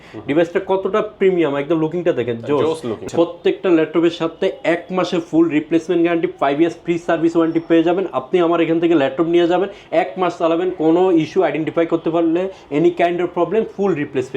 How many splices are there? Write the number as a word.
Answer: one